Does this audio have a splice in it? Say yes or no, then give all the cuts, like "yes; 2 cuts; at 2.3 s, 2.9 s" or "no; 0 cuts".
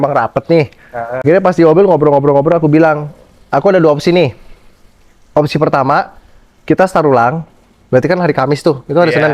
yes; 1 cut; at 1.2 s